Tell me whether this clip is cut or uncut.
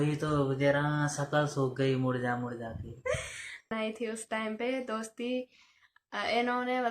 cut